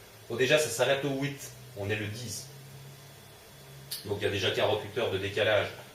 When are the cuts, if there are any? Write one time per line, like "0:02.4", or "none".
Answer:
0:04.5